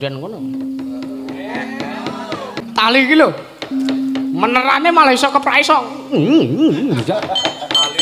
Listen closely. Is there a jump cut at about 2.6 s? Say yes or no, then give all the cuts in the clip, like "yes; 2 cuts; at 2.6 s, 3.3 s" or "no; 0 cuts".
yes; 1 cut; at 2.6 s